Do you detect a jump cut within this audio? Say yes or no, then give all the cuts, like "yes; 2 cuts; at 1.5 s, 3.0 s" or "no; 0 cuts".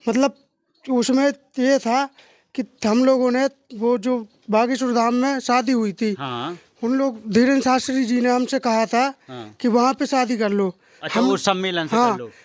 no; 0 cuts